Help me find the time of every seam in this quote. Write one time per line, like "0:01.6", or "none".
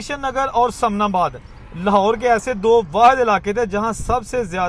none